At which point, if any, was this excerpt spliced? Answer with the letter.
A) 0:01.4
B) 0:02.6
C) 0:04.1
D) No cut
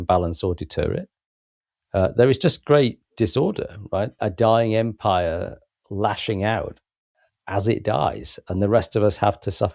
C